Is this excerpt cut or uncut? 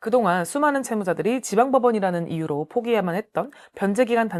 uncut